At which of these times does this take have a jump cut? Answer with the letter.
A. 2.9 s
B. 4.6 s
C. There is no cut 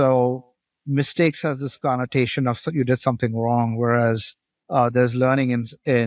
C